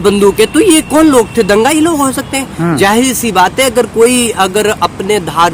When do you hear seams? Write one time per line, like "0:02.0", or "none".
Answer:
none